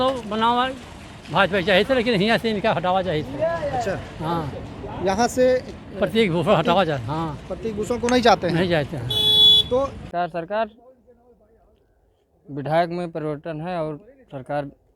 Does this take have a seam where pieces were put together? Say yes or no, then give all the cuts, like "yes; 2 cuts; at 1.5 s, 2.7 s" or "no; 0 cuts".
yes; 1 cut; at 10.1 s